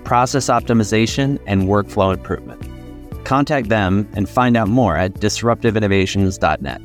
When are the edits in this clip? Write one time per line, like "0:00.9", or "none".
none